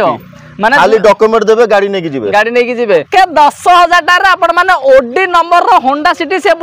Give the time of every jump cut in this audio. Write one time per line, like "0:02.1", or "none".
0:03.1